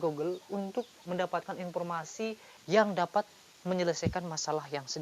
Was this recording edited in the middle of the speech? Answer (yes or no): yes